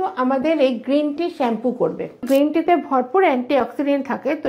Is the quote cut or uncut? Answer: cut